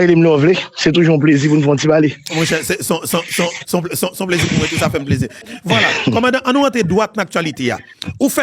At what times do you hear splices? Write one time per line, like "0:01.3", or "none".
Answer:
0:05.4